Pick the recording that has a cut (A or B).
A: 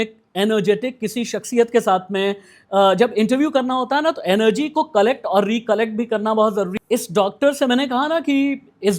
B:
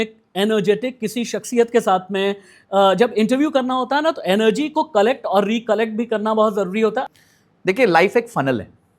A